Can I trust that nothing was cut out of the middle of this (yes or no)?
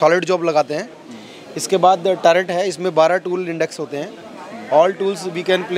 yes